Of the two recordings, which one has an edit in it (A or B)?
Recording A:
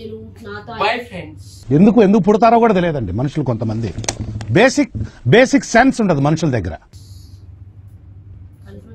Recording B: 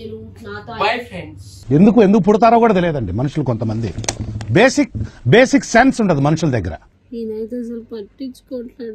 B